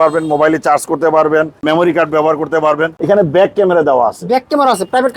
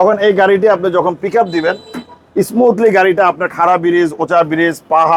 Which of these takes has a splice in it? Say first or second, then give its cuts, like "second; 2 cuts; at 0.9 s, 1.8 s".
first; 2 cuts; at 1.6 s, 2.9 s